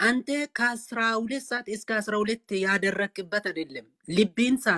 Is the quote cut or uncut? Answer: uncut